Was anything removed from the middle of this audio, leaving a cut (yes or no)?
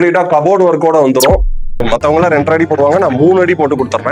yes